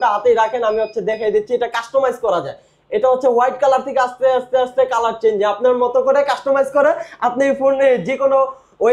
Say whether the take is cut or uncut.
uncut